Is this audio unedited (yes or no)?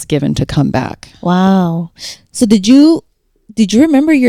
yes